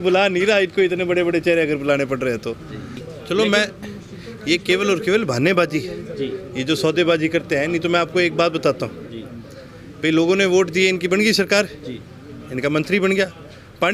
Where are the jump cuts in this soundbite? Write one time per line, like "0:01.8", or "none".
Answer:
0:03.1